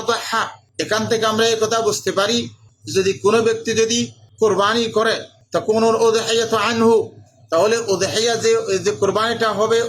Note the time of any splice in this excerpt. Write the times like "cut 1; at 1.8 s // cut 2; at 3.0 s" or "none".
none